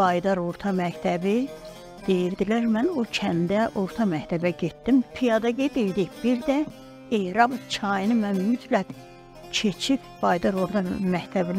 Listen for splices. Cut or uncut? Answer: cut